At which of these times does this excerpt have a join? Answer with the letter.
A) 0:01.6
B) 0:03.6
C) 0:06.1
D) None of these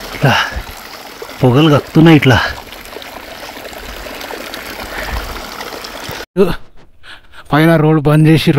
C